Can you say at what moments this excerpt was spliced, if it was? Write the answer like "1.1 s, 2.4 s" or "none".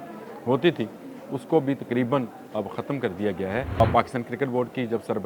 3.8 s